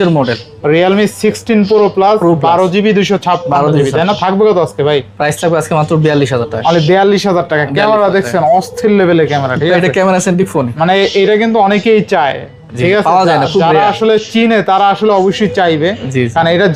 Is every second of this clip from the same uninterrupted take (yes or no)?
yes